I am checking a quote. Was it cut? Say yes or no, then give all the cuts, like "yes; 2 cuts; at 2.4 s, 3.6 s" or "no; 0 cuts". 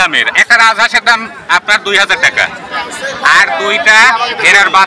no; 0 cuts